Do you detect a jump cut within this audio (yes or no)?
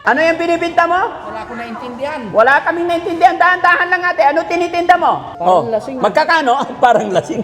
yes